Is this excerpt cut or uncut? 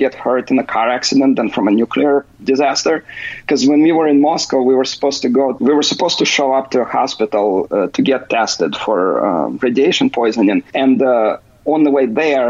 cut